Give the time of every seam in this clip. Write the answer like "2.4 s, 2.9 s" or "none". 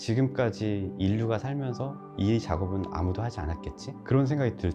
none